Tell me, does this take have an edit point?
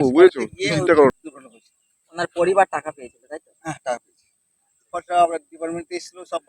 yes; 1 cut; at 1.3 s

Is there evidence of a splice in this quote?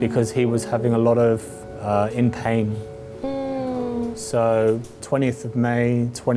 no; 0 cuts

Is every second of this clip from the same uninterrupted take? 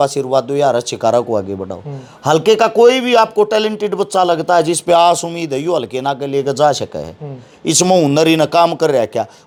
yes; 0 cuts

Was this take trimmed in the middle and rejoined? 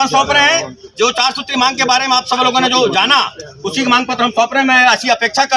no; 0 cuts

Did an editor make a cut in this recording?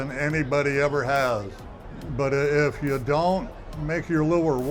no; 0 cuts

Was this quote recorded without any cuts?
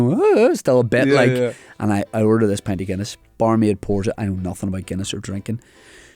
no; 1 cut; at 3.2 s

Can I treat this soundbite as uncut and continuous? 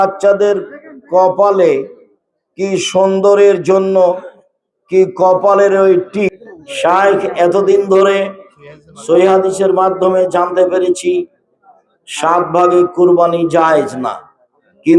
no; 1 cut; at 6.4 s

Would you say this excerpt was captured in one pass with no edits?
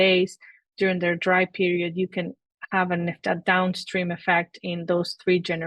no; 1 cut; at 3.2 s

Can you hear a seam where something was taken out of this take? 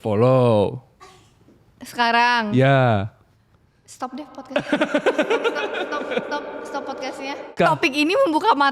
yes; 1 cut; at 7.6 s

